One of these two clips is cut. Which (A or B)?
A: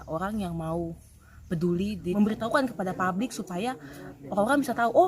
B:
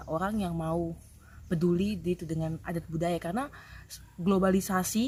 A